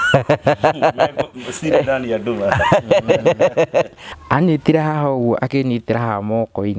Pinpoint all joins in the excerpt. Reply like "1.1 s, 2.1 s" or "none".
4.1 s